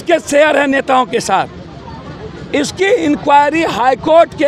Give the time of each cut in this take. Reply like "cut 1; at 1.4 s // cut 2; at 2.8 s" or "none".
none